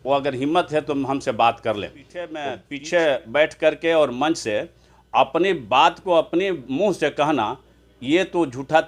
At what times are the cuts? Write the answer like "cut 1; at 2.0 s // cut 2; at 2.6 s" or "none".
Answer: none